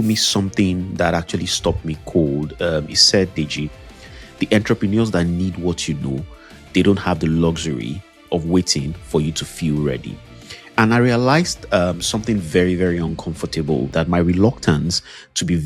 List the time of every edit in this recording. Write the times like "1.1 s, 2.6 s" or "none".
8.2 s, 13.9 s